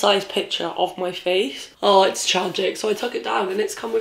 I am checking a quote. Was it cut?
yes; 1 cut; at 1.7 s

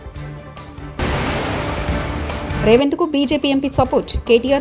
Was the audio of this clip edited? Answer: yes; 2 cuts; at 0.9 s, 2.6 s

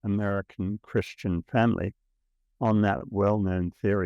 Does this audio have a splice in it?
no; 0 cuts

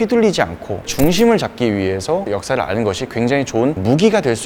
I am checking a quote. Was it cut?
no; 0 cuts

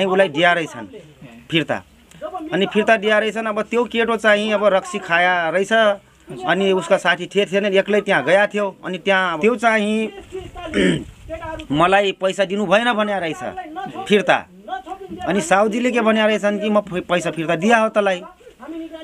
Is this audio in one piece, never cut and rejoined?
no; 1 cut; at 9.4 s

